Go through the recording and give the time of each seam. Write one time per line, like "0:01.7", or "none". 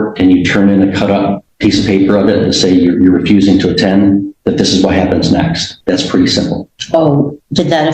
0:01.4
0:05.7